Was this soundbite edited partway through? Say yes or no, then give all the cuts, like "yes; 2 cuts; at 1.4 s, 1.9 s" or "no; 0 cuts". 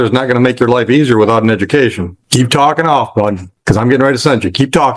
no; 0 cuts